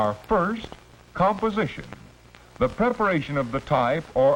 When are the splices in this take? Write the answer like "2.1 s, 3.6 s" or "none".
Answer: none